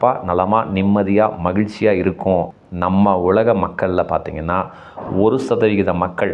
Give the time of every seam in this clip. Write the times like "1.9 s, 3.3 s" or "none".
2.6 s

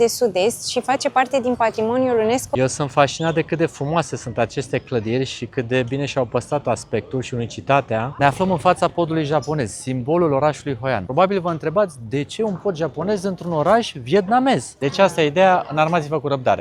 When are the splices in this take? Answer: 2.5 s, 8.1 s, 11.0 s, 14.7 s

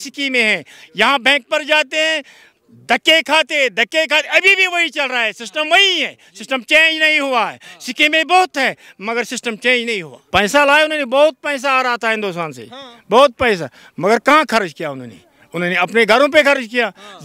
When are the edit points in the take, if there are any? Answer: 10.1 s

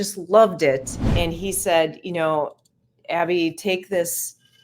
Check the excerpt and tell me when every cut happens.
1.1 s

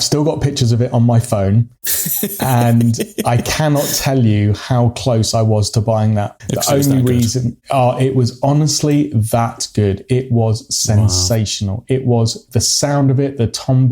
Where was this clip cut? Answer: 6.3 s

